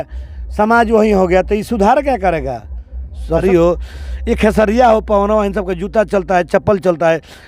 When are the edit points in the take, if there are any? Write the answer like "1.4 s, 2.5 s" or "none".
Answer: 3.4 s